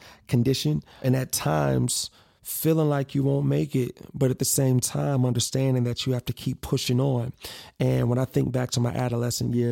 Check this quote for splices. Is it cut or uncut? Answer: cut